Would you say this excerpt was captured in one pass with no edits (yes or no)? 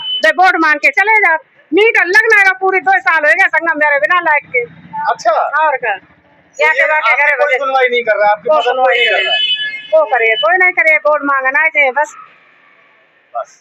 yes